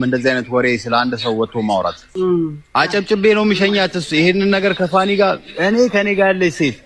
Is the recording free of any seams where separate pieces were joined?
no; 1 cut; at 2.0 s

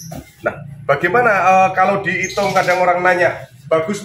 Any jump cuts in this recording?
no; 0 cuts

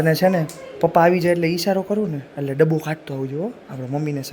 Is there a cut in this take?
no; 0 cuts

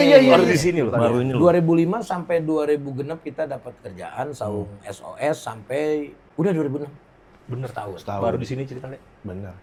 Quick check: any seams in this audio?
no; 0 cuts

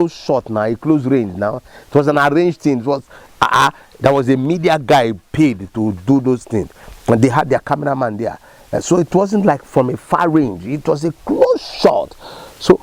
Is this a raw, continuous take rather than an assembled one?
yes; 0 cuts

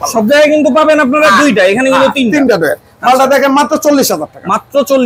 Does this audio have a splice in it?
no; 0 cuts

